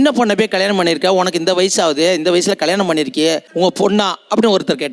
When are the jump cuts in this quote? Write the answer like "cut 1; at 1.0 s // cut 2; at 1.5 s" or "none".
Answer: none